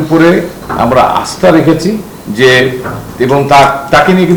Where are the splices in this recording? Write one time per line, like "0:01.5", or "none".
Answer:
none